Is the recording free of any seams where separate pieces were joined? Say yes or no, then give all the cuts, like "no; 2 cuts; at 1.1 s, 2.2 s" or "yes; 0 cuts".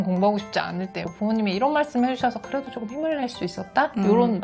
no; 1 cut; at 1.1 s